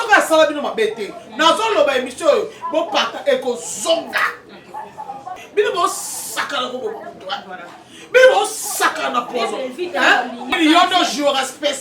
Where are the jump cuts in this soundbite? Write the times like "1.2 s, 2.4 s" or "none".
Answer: 5.4 s, 10.5 s